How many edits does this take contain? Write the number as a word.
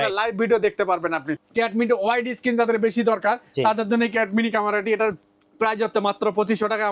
one